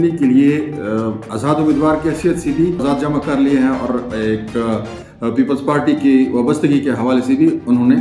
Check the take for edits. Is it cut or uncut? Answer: uncut